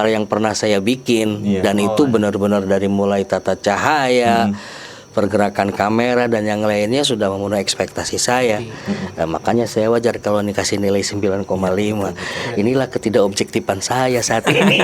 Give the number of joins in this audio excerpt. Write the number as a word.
zero